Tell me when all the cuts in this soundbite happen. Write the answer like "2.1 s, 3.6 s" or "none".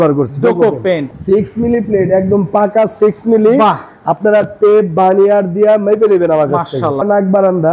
1.0 s, 7.0 s